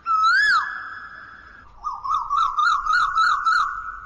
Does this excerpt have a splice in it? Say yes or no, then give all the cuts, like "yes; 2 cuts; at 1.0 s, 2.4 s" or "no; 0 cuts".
no; 0 cuts